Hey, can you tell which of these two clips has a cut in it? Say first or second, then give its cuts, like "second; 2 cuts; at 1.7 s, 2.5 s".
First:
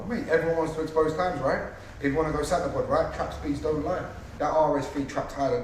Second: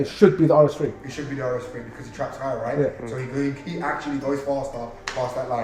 first; 1 cut; at 4.2 s